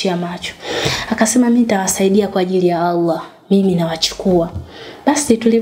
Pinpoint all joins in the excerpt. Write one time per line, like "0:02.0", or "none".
none